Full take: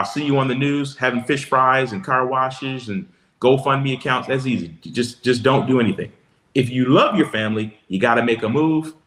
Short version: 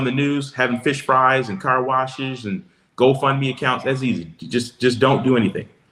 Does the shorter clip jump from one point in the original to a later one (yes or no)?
no